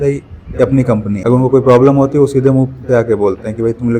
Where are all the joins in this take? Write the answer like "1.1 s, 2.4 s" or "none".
1.2 s